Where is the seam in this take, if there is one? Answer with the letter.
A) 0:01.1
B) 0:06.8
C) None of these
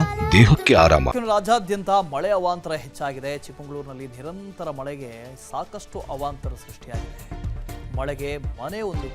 A